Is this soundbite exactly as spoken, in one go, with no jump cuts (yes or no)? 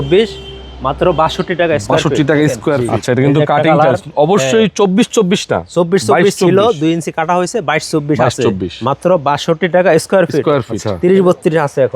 no